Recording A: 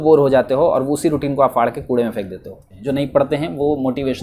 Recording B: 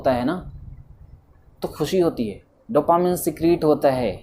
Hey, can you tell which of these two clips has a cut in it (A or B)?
A